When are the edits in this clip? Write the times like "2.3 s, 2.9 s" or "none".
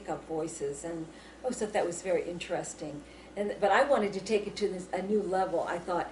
1.5 s